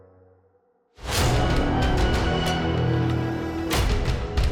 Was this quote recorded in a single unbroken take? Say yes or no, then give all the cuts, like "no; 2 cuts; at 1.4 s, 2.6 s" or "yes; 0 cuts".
yes; 0 cuts